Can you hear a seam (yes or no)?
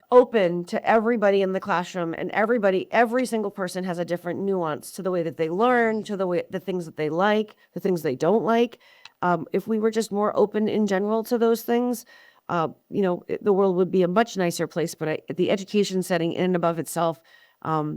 no